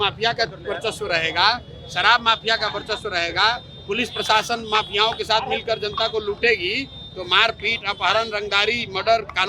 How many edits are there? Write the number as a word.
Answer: zero